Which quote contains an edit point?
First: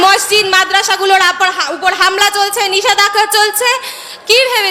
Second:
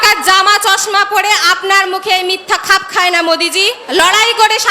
second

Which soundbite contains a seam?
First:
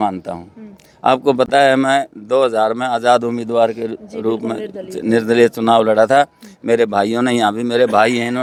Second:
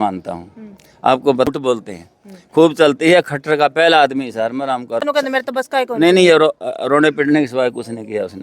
second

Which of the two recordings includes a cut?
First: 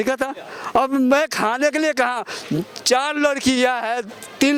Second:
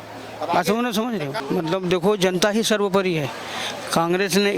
second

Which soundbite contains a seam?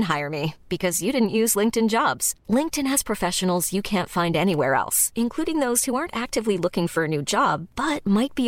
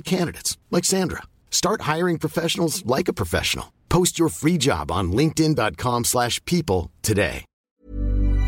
second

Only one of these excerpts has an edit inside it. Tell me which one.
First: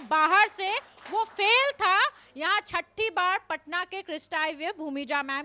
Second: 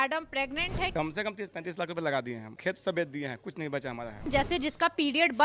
second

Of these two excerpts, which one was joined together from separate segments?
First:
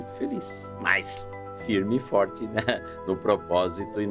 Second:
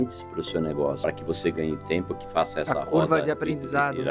second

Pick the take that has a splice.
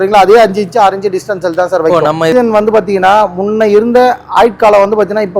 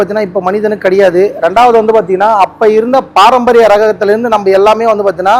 first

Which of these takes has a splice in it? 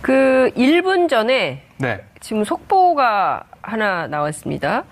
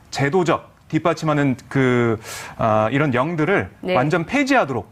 second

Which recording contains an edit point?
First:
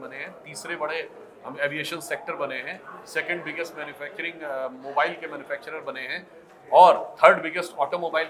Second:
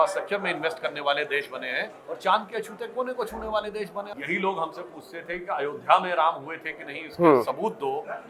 second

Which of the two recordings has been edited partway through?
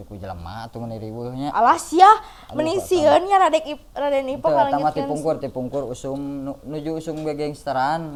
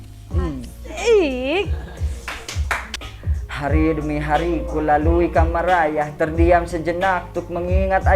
second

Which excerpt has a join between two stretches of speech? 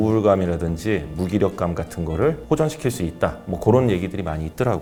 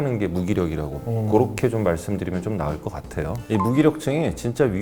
second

